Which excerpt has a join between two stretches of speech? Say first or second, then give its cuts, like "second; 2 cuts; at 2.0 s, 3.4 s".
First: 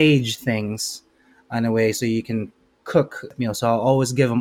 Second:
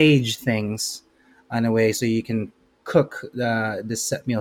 first; 1 cut; at 3.3 s